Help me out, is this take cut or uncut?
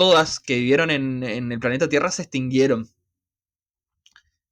uncut